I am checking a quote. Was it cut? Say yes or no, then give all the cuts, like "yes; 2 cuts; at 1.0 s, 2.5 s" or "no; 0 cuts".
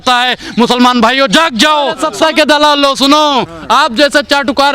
yes; 1 cut; at 2.0 s